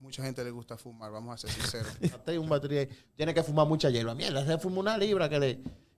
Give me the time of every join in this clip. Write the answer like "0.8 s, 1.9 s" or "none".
2.2 s